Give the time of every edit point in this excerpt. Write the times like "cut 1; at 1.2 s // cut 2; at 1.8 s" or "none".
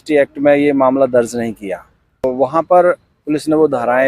cut 1; at 2.2 s